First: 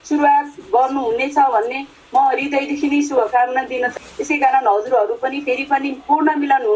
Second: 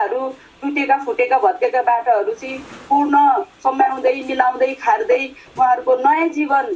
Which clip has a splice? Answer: first; 1 cut; at 3.9 s

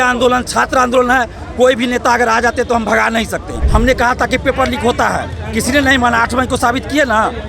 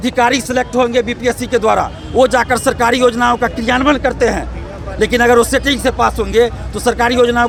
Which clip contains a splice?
first; 1 cut; at 3.6 s

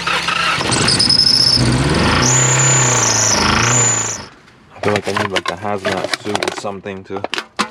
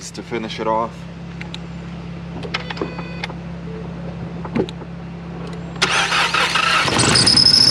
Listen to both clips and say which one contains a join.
first; 1 cut; at 4.0 s

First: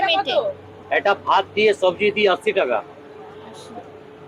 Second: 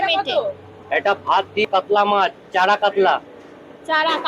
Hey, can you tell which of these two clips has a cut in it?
second; 1 cut; at 1.6 s

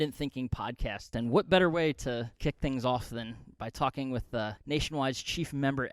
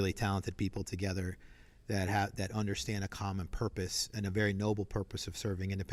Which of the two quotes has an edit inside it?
first; 3 cuts; at 1.1 s, 2.3 s, 4.6 s

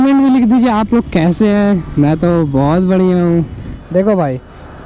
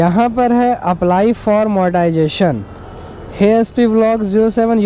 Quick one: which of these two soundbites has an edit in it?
first; 1 cut; at 3.7 s

